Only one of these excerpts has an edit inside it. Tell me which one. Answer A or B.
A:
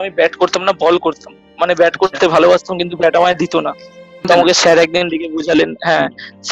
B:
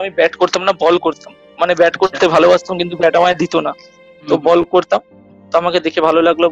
A